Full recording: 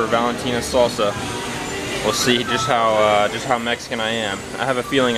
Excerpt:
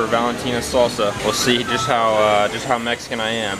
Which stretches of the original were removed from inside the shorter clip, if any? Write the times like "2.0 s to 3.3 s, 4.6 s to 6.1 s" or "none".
1.2 s to 2.0 s